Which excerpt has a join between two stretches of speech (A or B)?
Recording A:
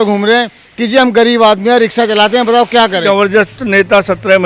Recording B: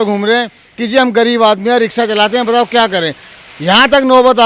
A